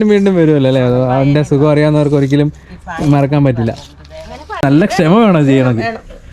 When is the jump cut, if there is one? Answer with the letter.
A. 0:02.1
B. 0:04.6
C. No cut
B